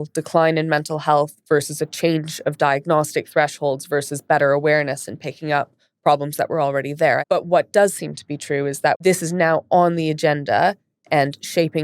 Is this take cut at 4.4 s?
no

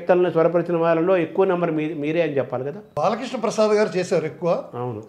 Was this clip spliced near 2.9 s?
yes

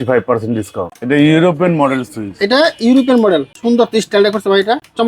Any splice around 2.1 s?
no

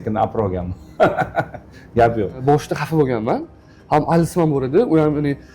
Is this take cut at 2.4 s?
yes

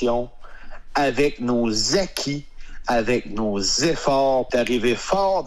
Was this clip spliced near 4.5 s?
yes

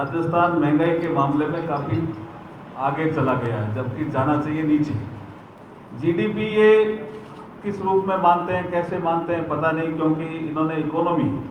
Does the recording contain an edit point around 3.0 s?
no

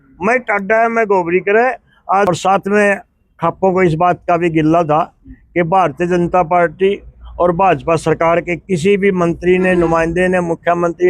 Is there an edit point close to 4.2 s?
no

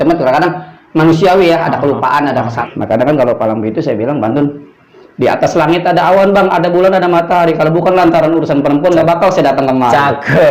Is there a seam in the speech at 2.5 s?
yes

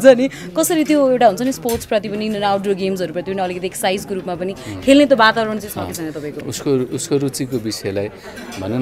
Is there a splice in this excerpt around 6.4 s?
yes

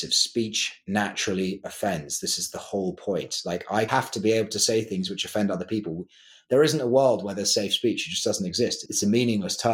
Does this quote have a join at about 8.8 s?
yes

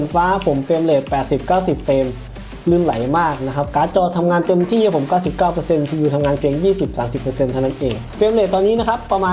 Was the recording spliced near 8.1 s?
yes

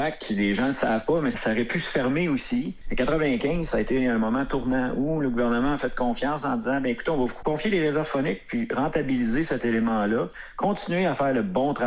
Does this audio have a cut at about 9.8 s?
no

